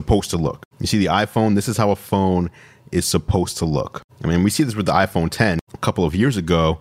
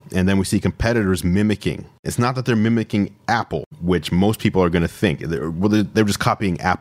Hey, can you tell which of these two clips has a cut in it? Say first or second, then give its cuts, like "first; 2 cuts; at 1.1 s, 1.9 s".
second; 1 cut; at 2.1 s